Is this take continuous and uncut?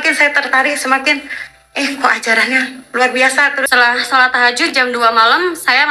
no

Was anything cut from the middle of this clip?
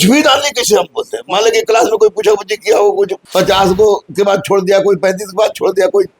yes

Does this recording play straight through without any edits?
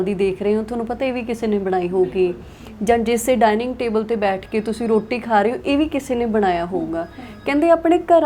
yes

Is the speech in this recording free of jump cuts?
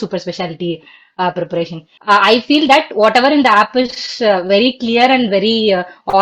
no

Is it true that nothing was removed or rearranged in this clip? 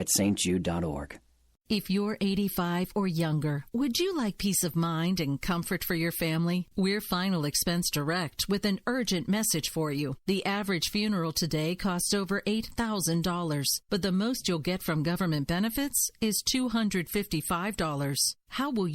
no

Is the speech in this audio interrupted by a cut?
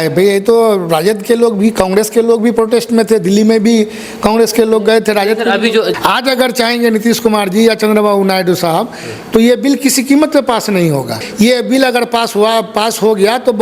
yes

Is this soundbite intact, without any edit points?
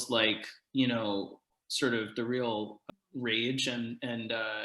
no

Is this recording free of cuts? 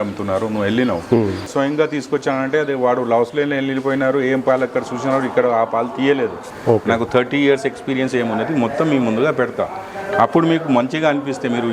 no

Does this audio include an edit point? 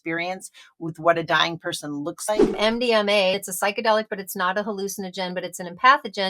yes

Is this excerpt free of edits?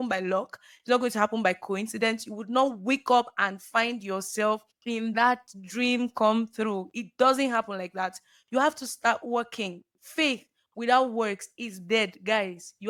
yes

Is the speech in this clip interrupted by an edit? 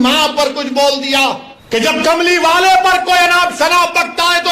yes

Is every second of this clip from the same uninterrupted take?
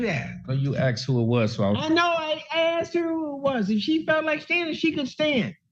yes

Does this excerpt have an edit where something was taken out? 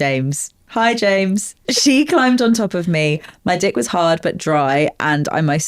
yes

